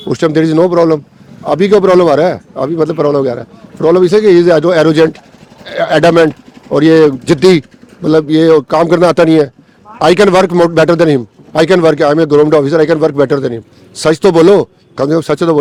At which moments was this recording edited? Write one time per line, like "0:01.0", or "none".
none